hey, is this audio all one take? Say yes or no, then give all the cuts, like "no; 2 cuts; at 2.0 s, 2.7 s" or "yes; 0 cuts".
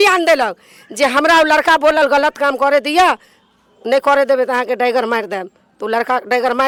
yes; 0 cuts